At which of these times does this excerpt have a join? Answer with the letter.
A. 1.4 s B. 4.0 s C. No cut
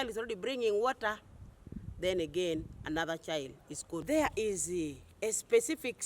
B